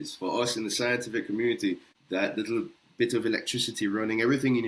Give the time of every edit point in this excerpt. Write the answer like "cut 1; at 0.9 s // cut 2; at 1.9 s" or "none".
cut 1; at 1.9 s